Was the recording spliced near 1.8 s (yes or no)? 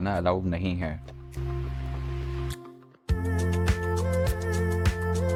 no